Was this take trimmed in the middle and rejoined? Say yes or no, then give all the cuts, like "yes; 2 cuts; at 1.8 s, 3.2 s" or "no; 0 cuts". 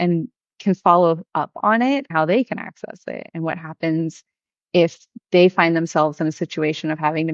yes; 1 cut; at 2.1 s